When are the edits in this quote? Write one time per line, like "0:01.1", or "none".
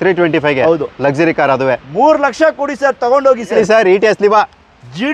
0:03.5

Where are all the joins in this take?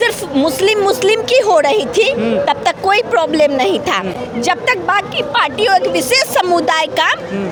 none

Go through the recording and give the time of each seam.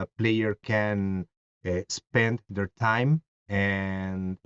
none

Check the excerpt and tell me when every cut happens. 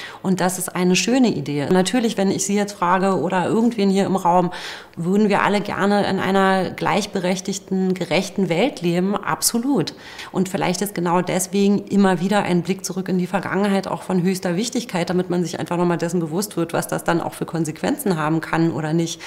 0:01.7
0:10.1

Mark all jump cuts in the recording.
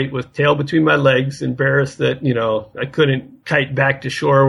0:03.3

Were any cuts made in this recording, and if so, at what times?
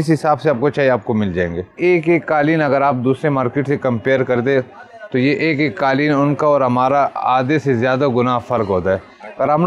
0:01.8

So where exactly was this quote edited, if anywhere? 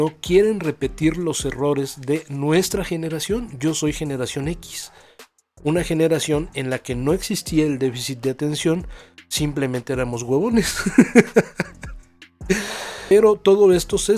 0:13.1

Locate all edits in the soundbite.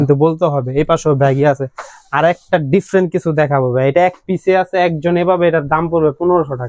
none

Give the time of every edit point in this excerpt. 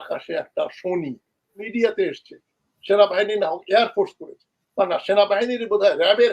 0:01.6

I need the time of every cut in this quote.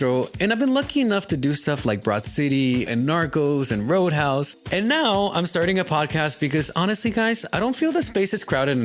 0:04.5

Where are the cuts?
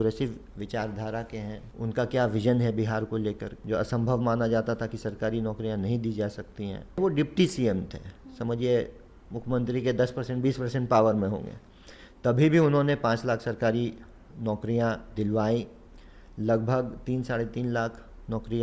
0:01.7
0:03.5
0:07.0

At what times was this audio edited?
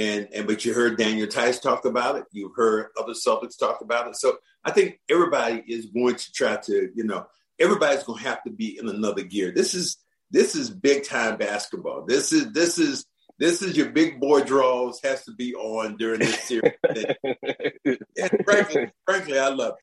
0:18.9

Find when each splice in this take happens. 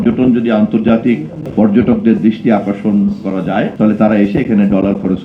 0:01.4
0:03.7

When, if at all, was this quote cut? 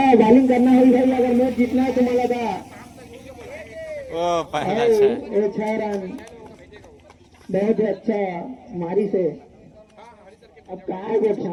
none

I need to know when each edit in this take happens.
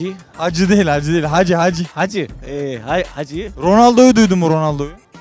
none

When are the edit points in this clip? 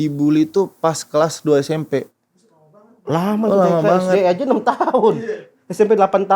none

